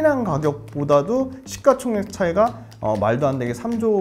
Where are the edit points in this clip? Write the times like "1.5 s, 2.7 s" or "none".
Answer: none